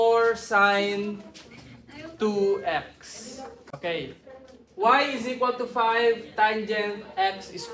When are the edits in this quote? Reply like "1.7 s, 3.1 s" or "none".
3.8 s

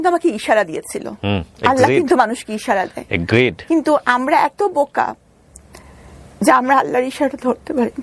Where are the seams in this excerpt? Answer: none

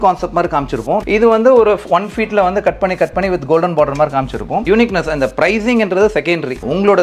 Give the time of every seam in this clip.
1.0 s, 4.7 s

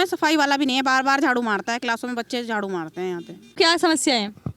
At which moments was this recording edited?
3.4 s

